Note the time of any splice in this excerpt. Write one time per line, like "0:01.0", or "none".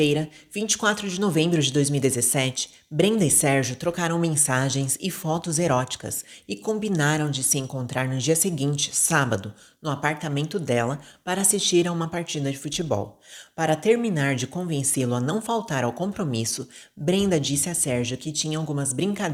none